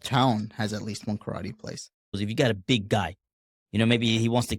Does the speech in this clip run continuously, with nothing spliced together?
no; 1 cut; at 2.2 s

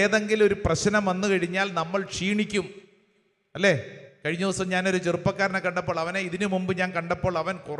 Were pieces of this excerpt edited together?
no; 0 cuts

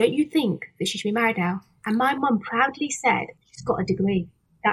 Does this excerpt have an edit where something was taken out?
yes; 1 cut; at 3.5 s

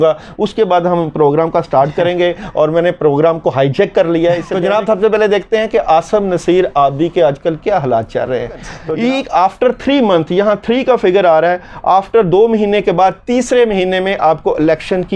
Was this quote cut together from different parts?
yes; 2 cuts; at 4.5 s, 8.7 s

